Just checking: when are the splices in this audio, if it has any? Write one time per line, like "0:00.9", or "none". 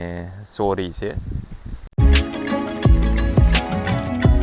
0:02.0